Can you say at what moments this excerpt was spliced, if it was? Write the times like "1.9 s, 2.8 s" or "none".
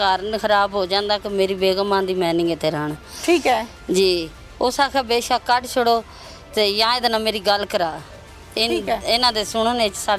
none